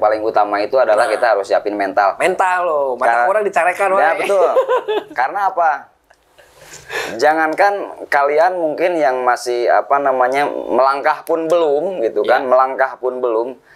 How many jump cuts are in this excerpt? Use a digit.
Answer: 0